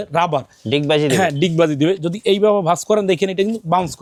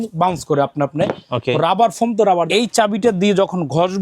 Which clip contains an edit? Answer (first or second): second